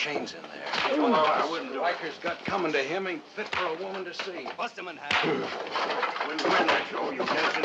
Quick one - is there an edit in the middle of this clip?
yes; 2 cuts; at 4.6 s, 5.7 s

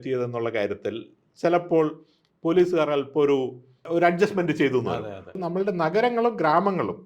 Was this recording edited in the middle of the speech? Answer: yes; 1 cut; at 5.4 s

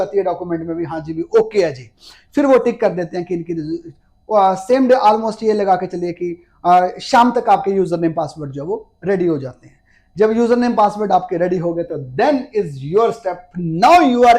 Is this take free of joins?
yes; 0 cuts

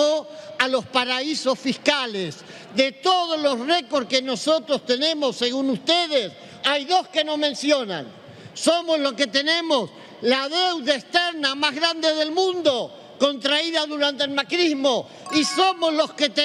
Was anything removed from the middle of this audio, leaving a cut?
no; 0 cuts

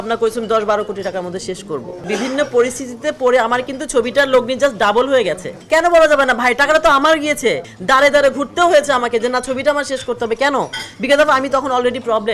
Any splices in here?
yes; 3 cuts; at 2.0 s, 5.5 s, 7.7 s

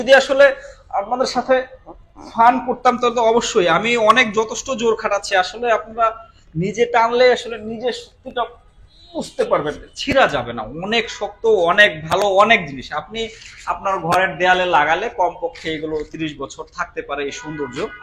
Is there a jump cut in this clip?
no; 0 cuts

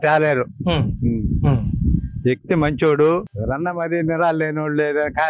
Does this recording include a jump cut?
yes; 1 cut; at 3.3 s

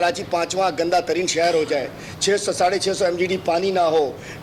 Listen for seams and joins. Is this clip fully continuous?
yes; 0 cuts

